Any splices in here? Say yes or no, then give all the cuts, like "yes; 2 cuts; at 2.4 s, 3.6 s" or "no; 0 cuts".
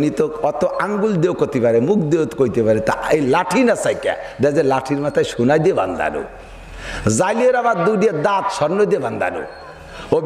no; 0 cuts